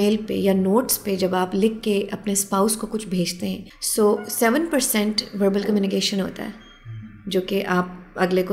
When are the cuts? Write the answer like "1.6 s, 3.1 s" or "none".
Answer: 3.7 s